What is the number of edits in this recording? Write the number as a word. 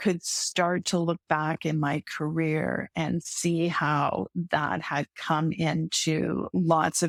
zero